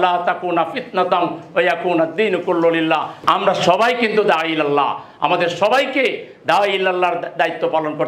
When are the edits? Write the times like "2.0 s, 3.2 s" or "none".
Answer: 3.1 s